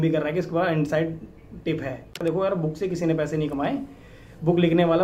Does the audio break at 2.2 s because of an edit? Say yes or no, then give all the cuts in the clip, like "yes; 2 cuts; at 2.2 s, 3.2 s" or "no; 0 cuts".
yes; 1 cut; at 2.2 s